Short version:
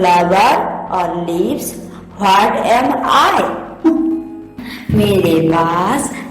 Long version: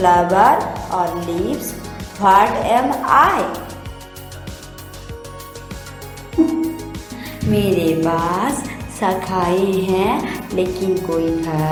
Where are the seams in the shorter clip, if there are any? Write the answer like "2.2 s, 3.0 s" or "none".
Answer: 3.7 s